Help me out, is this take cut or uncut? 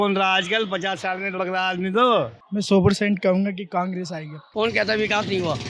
cut